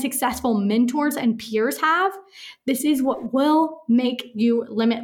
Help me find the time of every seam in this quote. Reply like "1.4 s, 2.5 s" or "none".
none